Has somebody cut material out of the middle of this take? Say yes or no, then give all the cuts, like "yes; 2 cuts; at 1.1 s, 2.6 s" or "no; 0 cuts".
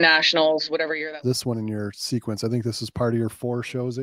yes; 1 cut; at 0.9 s